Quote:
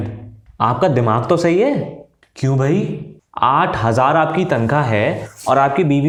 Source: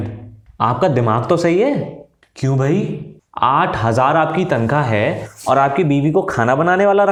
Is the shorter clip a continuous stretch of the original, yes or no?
yes